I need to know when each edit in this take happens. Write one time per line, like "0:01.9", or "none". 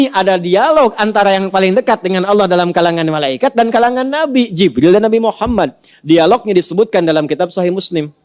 none